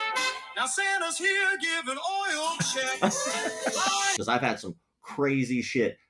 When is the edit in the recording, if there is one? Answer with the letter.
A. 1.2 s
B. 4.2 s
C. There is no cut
B